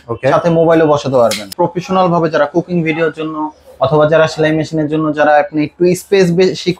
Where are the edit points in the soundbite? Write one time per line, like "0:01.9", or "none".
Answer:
0:01.5